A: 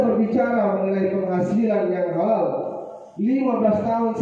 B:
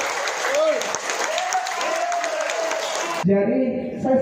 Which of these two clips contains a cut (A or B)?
B